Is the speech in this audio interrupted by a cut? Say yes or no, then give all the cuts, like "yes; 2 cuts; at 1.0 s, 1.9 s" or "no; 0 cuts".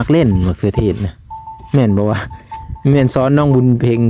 no; 0 cuts